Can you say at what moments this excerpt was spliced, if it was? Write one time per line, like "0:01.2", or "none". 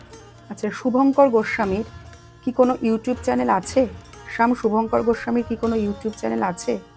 none